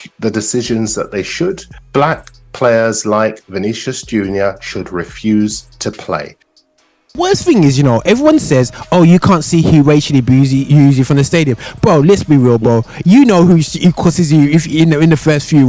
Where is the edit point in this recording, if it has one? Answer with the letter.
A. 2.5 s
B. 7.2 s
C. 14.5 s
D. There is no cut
B